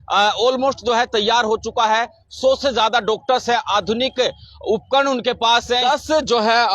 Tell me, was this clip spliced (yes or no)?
yes